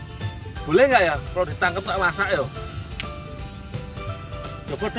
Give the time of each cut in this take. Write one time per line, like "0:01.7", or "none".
none